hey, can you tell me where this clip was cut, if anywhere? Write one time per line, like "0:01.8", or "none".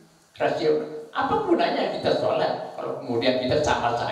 none